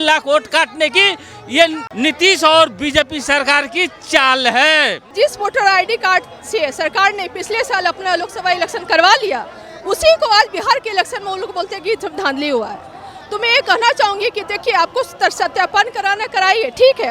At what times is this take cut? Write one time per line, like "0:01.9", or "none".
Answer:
0:01.8
0:05.0